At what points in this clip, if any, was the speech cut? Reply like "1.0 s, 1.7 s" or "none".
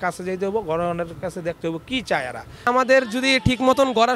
2.6 s